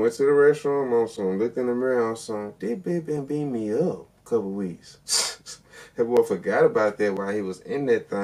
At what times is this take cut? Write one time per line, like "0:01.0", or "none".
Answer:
none